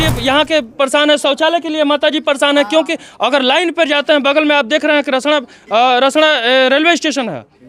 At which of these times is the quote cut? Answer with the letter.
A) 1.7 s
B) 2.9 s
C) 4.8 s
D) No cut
D